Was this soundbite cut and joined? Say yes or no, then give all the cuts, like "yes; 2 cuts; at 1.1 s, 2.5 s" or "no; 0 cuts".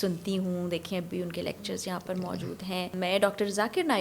yes; 1 cut; at 2.9 s